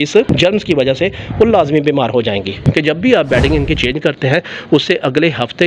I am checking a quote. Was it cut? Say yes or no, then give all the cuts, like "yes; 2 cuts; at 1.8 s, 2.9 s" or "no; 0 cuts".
yes; 1 cut; at 2.6 s